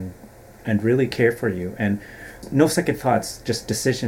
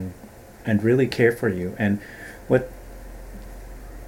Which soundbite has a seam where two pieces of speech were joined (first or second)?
first